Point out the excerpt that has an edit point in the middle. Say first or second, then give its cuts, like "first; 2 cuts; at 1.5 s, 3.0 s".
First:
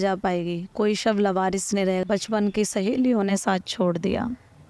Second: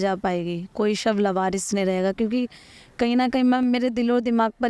first; 1 cut; at 2.0 s